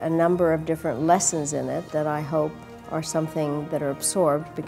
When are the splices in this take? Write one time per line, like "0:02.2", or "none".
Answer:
0:02.6